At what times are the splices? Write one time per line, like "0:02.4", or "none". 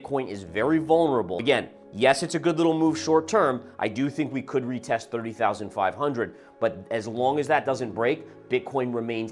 0:01.4